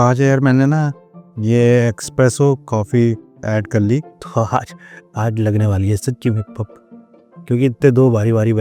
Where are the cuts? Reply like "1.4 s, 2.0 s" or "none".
4.2 s